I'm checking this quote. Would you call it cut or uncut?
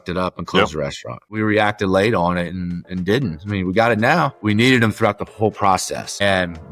cut